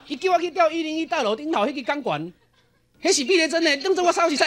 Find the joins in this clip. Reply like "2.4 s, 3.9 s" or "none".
none

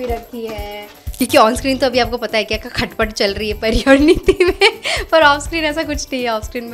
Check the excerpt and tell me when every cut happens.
1.1 s

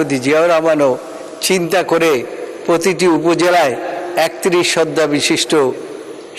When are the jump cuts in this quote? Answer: none

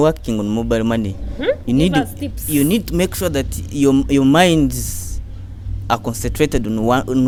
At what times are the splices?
none

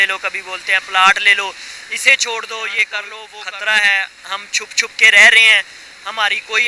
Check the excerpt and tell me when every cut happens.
3.2 s

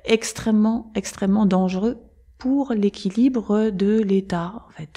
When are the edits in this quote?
none

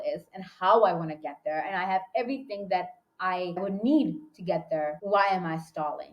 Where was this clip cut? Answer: 3.6 s, 5.0 s

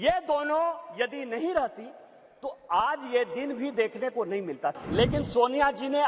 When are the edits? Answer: 4.8 s

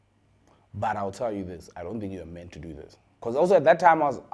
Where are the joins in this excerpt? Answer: 3.1 s

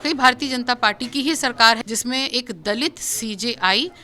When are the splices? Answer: 1.8 s

